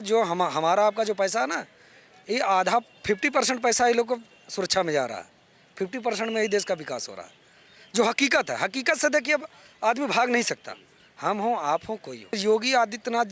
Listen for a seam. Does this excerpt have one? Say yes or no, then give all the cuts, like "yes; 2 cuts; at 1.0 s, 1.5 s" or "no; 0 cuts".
yes; 1 cut; at 12.4 s